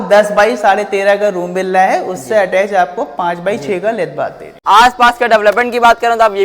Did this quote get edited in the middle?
yes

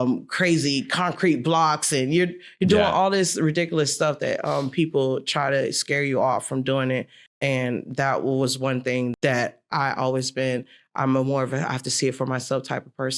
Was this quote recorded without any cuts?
no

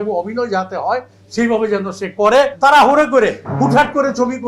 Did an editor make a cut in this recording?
yes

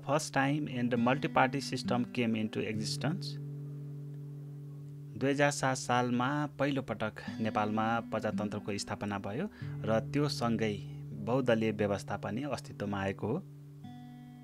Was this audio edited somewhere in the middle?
no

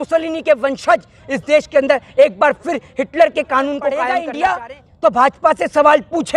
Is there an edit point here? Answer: yes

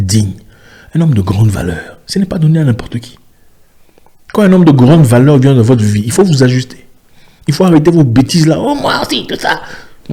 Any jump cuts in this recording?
no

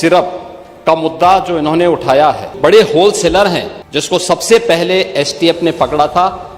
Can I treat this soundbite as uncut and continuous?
no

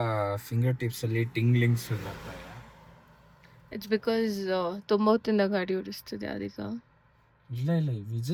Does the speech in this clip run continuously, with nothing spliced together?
yes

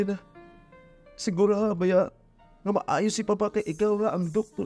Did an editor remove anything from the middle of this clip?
no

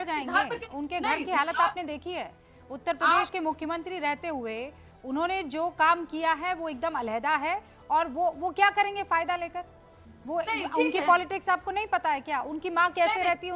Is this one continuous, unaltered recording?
yes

